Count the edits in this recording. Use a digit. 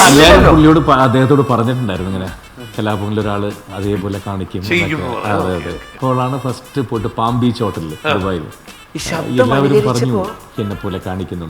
2